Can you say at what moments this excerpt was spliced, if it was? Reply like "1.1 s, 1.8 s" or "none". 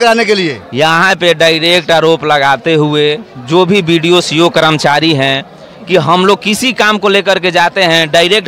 none